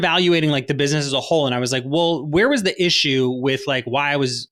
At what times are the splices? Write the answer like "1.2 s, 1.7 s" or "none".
none

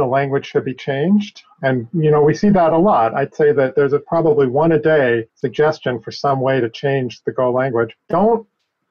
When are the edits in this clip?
5.4 s, 8.0 s

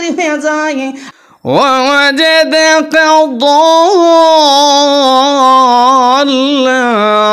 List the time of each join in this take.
1.0 s

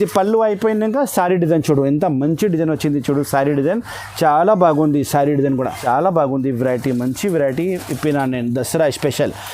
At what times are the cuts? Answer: 5.8 s

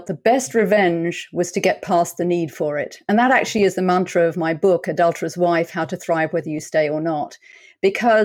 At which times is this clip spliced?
none

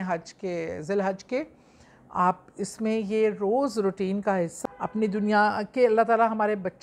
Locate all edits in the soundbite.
4.5 s

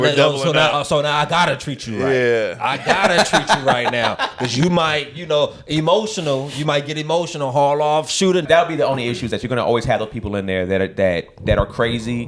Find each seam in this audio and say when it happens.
8.4 s

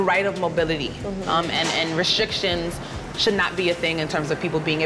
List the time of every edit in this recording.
none

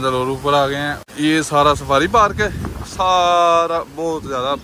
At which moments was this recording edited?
1.0 s

